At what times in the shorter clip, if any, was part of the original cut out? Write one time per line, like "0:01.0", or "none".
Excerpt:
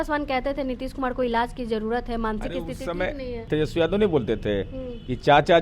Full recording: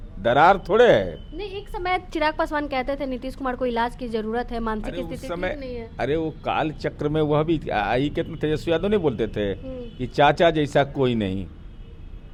0:03.4